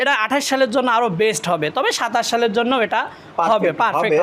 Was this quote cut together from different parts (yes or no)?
no